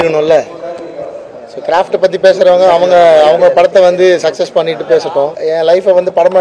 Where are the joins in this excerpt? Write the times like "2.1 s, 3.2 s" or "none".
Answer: 5.4 s